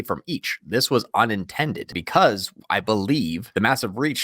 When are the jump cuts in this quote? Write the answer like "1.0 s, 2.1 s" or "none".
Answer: 1.9 s, 3.4 s